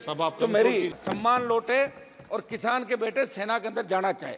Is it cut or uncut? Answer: cut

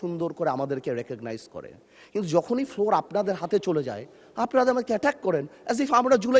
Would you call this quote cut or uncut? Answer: uncut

